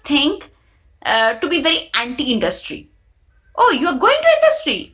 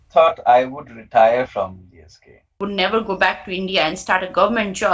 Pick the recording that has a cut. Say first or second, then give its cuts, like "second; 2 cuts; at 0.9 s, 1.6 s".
second; 1 cut; at 2.6 s